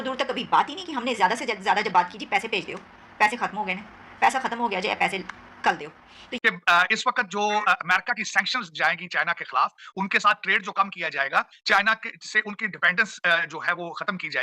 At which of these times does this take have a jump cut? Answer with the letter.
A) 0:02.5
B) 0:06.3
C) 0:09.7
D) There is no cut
B